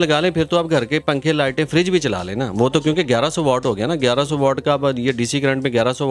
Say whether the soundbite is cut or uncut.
uncut